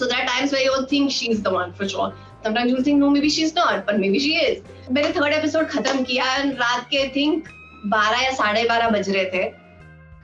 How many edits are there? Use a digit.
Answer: 1